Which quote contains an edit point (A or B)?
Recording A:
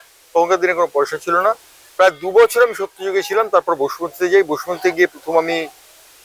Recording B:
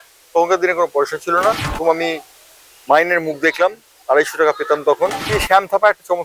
B